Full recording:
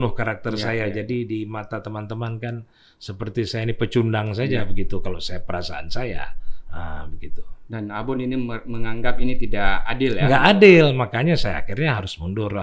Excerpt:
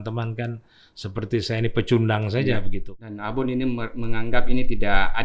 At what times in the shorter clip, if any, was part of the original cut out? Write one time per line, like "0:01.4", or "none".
0:02.8

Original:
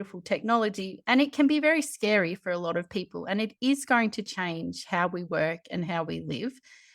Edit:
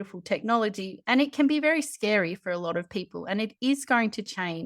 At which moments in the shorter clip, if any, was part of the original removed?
none

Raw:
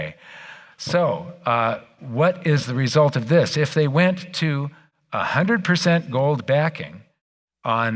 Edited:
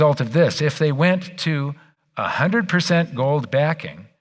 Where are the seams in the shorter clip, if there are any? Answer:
none

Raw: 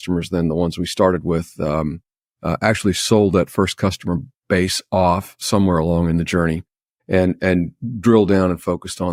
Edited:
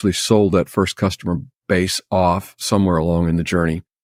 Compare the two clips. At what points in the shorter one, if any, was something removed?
none

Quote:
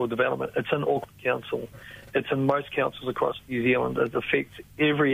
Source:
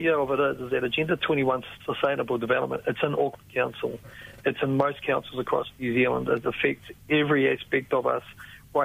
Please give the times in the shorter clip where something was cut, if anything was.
none

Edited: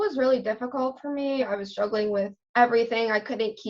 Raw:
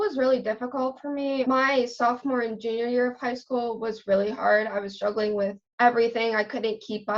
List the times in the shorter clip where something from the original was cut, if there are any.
0:01.4

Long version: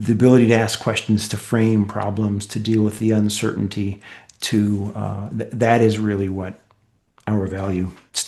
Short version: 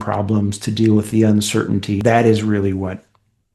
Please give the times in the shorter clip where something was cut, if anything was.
0:02.0

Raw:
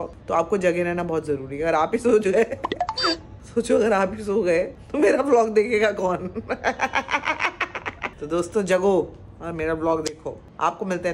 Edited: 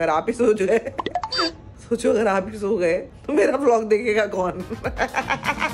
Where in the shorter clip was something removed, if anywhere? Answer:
none

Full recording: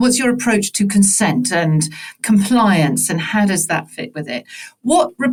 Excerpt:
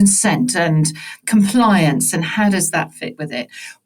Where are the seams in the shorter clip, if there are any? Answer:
none

